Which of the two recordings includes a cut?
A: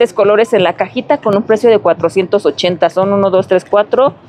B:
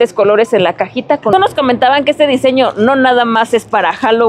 B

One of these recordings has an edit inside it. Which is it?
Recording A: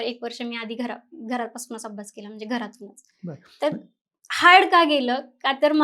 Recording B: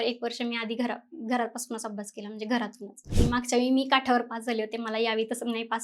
B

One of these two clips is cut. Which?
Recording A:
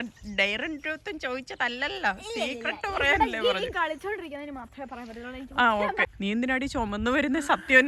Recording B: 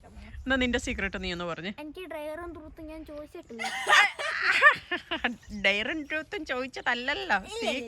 A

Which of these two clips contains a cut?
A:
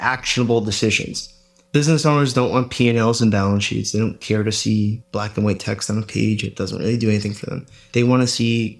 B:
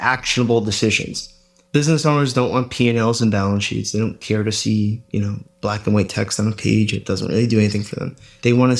A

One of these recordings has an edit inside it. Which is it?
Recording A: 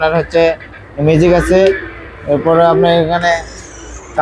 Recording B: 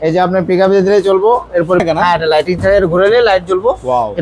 B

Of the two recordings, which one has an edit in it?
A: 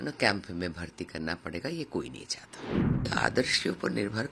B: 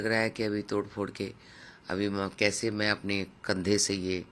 A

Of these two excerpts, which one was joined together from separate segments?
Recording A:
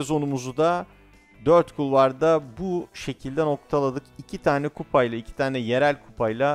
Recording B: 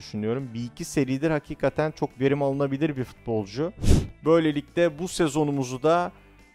B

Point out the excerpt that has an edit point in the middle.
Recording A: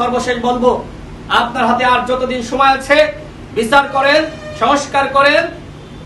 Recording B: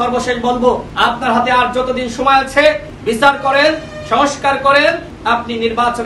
B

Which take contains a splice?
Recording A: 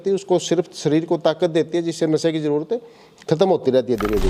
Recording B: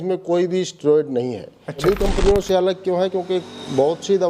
B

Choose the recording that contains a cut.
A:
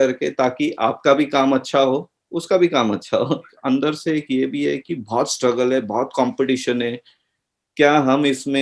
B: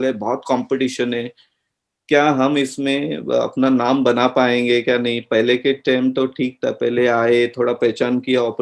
A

